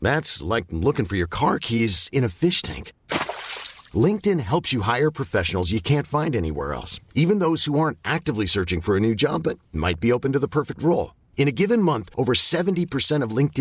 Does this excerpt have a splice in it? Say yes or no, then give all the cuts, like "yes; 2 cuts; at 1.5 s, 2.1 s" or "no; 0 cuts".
no; 0 cuts